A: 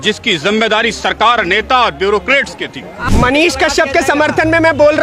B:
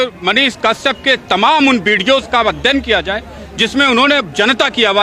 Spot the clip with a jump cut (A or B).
A